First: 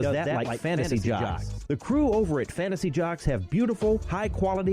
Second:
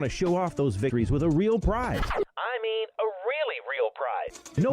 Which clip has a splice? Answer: second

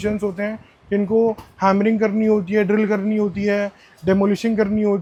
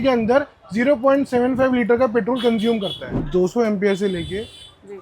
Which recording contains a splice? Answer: second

